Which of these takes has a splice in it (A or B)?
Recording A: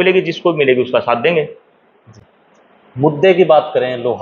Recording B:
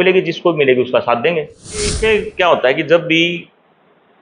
B